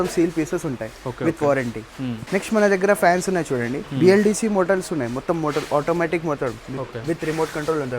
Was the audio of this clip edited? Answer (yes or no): no